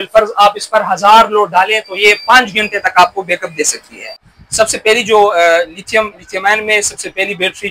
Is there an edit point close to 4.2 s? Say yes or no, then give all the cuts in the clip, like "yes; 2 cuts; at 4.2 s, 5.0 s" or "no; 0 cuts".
yes; 1 cut; at 4.2 s